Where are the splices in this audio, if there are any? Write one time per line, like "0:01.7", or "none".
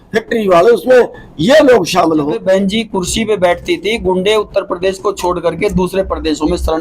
0:02.4